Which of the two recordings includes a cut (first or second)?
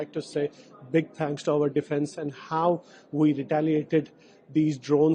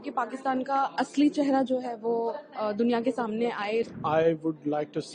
second